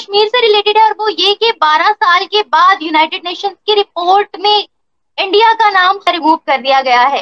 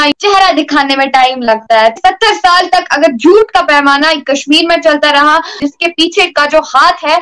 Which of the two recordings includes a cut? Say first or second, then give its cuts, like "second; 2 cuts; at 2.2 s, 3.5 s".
second; 2 cuts; at 1.9 s, 5.5 s